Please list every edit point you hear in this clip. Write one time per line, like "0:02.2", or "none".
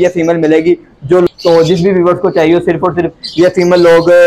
0:01.3